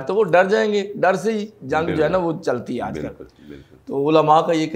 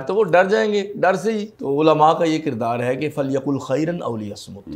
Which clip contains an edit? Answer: second; 1 cut; at 1.5 s

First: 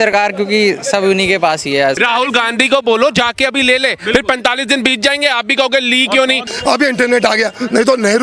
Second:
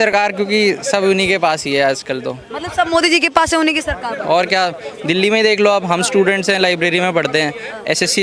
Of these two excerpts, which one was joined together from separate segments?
first; 2 cuts; at 2.0 s, 6.4 s

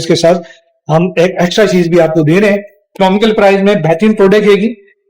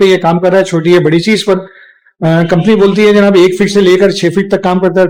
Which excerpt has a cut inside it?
first; 1 cut; at 2.8 s

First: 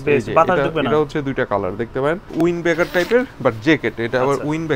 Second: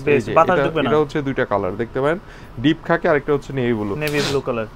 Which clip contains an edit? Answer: first; 1 cut; at 2.3 s

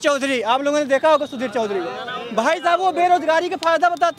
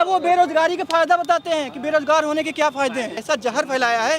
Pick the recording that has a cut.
second; 1 cut; at 3.2 s

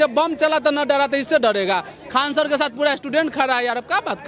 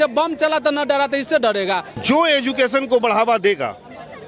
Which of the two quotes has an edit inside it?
second; 1 cut; at 1.9 s

